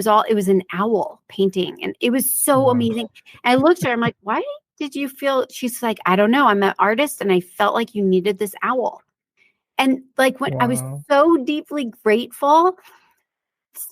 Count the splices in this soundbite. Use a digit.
0